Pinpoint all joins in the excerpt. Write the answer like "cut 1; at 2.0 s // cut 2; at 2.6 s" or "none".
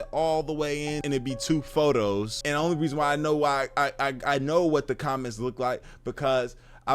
cut 1; at 1.0 s // cut 2; at 2.4 s